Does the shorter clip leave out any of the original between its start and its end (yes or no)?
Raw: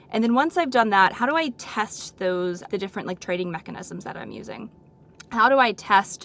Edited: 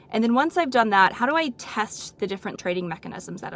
yes